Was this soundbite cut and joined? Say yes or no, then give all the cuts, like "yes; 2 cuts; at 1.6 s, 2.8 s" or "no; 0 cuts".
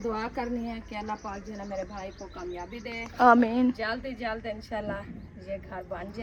no; 0 cuts